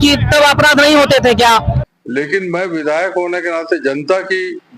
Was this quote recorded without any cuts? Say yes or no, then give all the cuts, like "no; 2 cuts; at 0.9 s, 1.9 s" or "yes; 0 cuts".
no; 1 cut; at 1.8 s